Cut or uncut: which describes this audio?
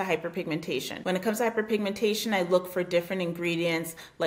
cut